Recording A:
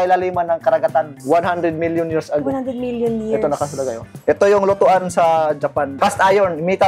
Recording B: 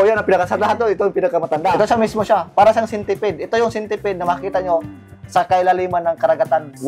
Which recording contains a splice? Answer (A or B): A